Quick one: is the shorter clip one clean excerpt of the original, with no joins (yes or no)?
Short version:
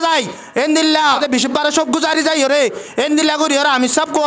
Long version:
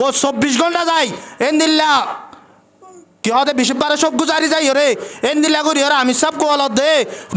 no